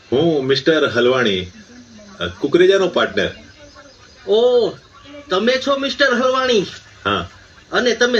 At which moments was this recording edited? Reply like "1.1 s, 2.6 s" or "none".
none

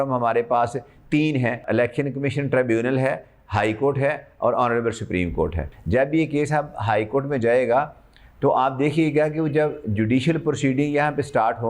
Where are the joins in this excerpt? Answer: 1.6 s, 5.7 s

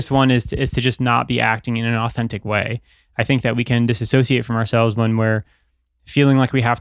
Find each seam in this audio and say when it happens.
none

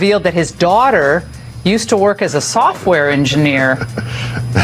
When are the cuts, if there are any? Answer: none

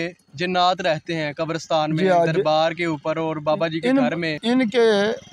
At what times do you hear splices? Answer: 4.3 s

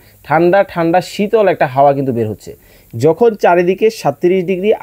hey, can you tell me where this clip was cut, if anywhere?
none

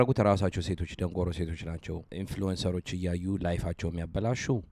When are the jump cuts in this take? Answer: 2.1 s

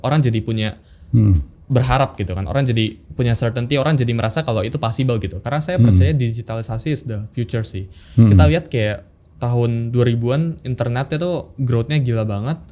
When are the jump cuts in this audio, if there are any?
5.4 s

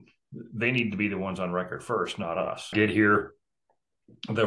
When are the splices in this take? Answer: 2.7 s

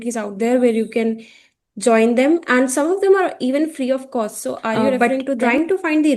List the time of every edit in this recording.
5.0 s

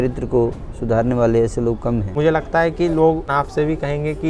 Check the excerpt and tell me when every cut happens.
2.1 s, 3.3 s

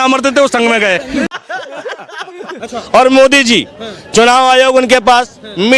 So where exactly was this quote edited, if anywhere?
1.3 s, 2.6 s

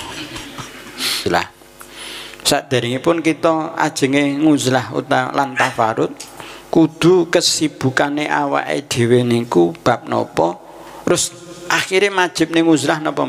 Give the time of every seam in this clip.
1.2 s

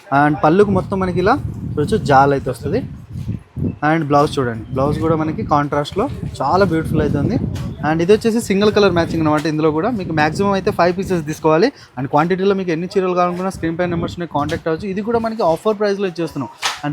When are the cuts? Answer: none

